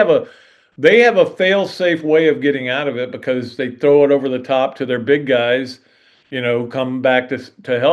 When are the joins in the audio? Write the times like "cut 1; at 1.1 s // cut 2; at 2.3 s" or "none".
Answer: none